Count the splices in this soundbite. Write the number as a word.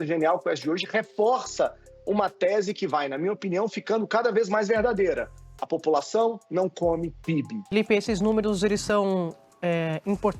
one